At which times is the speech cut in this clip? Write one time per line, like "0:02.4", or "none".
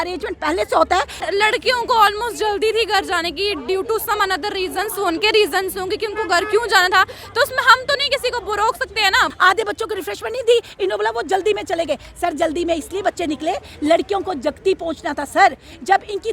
0:01.2
0:09.3